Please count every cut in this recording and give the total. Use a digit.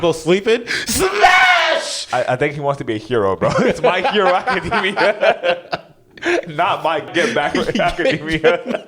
1